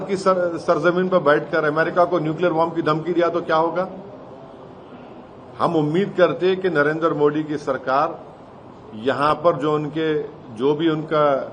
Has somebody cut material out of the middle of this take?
no; 0 cuts

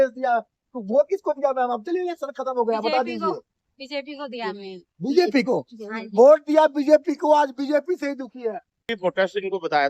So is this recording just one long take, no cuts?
no; 1 cut; at 8.9 s

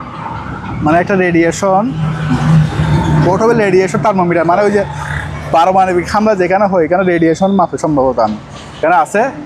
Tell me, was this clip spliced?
no; 0 cuts

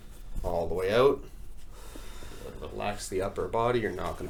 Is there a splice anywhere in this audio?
no; 0 cuts

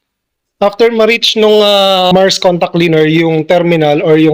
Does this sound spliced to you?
yes; 1 cut; at 2.0 s

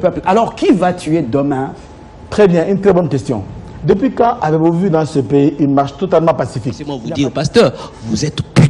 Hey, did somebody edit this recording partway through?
yes; 1 cut; at 7.0 s

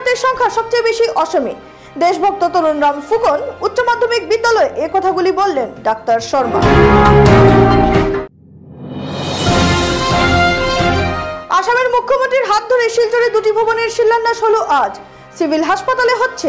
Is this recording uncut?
yes; 0 cuts

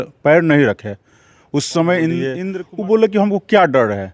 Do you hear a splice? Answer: yes; 1 cut; at 2.4 s

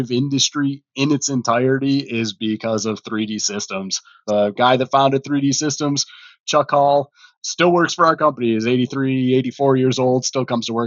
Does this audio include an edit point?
yes; 1 cut; at 4.2 s

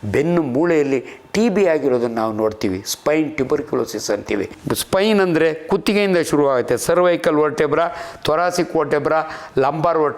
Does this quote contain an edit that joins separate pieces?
yes; 1 cut; at 4.6 s

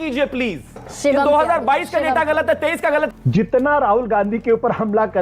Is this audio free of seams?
no; 1 cut; at 3.1 s

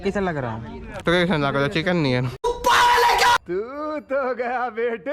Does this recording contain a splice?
yes; 2 cuts; at 0.9 s, 2.4 s

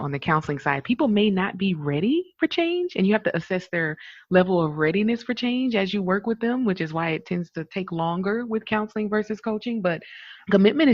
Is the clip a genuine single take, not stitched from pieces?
yes; 0 cuts

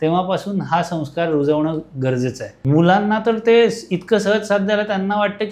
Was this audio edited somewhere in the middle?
yes; 1 cut; at 2.5 s

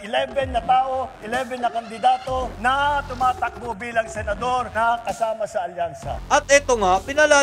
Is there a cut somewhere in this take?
yes; 1 cut; at 6.1 s

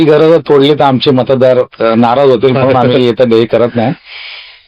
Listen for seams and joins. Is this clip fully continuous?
yes; 0 cuts

